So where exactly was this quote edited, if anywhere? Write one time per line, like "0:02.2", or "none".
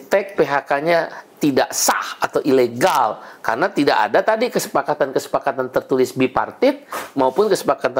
none